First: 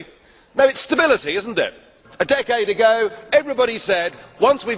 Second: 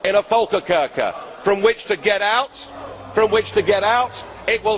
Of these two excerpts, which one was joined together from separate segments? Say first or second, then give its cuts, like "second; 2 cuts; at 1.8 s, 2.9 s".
second; 1 cut; at 3.8 s